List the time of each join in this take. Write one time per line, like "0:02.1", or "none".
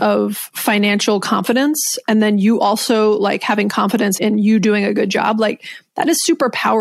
0:04.2